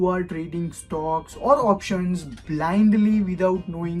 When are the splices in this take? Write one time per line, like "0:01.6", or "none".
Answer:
none